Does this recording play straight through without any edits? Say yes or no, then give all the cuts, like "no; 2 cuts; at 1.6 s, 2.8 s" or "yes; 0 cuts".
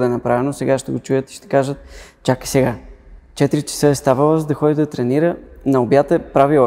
yes; 0 cuts